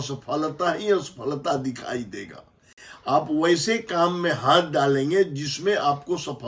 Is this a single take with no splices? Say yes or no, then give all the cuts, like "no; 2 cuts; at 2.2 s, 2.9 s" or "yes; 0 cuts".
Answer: yes; 0 cuts